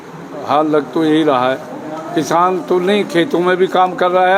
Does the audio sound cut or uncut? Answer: uncut